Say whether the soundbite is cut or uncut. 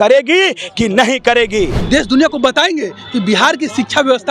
cut